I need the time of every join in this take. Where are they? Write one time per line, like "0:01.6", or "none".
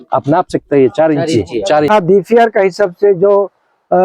0:01.9

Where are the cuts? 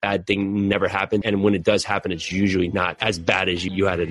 0:01.2
0:03.0

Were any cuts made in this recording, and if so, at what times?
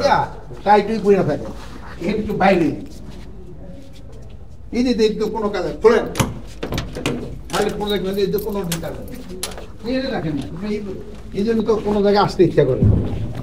none

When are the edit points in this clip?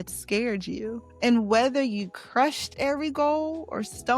0:01.1

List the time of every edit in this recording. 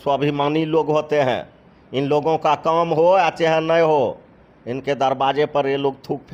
none

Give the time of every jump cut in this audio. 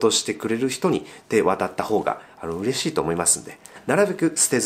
0:03.8

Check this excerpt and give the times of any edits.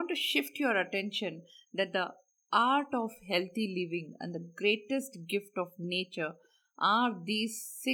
none

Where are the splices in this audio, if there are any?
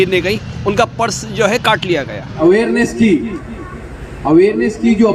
0:02.2

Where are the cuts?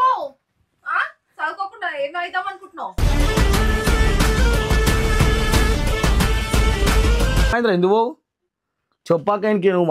none

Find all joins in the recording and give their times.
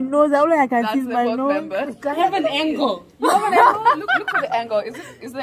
0:02.2

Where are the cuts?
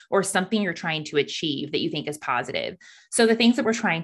none

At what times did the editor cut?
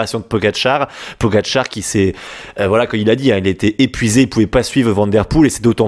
none

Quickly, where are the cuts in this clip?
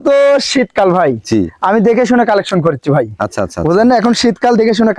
none

